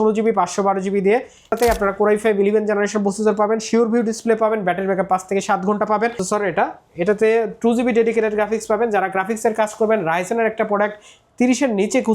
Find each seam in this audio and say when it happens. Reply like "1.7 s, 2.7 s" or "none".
1.5 s, 6.2 s